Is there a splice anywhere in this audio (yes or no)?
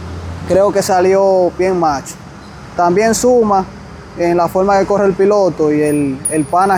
no